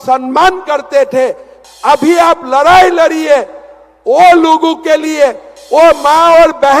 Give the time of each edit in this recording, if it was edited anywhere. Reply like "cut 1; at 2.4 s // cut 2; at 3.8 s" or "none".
cut 1; at 1.5 s